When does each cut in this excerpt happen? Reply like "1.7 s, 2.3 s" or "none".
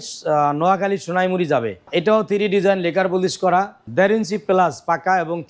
1.9 s, 3.8 s